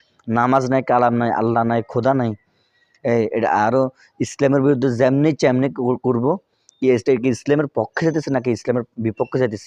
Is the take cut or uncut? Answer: uncut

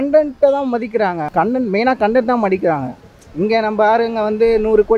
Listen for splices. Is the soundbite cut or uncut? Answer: cut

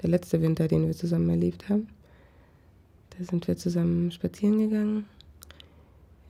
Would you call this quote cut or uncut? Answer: uncut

